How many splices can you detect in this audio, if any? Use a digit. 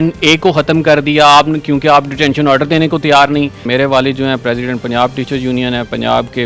1